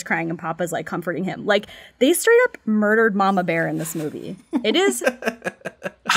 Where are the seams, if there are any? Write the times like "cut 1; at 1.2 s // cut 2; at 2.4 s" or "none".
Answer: none